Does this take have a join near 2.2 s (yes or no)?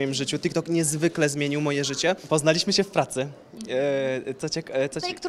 yes